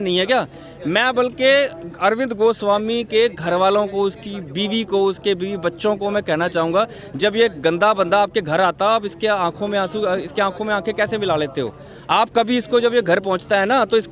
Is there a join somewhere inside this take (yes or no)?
no